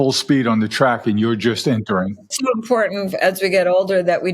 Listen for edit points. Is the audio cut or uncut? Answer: cut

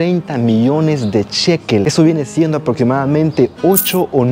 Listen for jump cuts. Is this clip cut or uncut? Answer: uncut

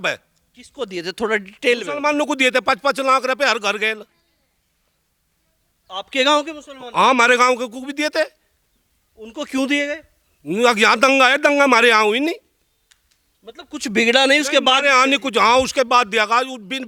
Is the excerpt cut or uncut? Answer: uncut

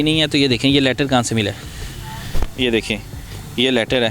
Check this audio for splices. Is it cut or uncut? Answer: uncut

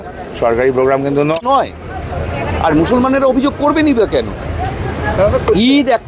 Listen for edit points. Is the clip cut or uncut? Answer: cut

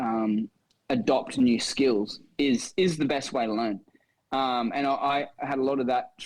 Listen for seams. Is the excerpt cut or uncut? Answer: uncut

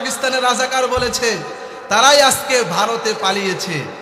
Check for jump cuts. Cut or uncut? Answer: uncut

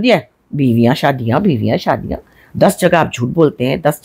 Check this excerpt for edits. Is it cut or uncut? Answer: uncut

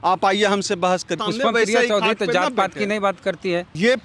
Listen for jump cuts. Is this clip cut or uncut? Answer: cut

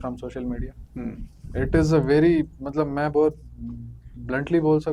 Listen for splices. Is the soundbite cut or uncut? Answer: uncut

